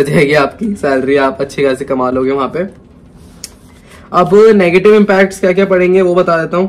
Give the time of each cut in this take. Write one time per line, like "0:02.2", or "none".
none